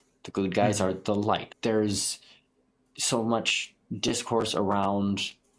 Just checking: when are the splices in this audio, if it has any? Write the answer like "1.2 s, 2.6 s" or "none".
1.5 s